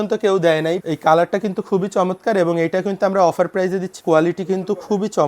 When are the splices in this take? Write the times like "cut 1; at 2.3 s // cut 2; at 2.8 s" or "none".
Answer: cut 1; at 0.8 s // cut 2; at 3.9 s

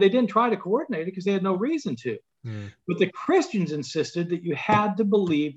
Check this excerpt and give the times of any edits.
none

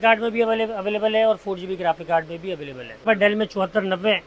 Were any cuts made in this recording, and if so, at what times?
cut 1; at 3.0 s

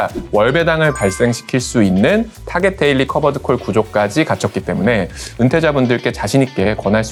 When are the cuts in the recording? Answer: none

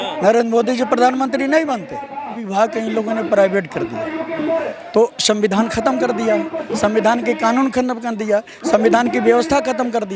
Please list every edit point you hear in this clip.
cut 1; at 2.4 s

